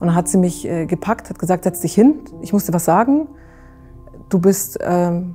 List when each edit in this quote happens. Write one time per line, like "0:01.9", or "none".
none